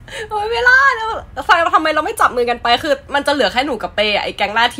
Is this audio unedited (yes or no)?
yes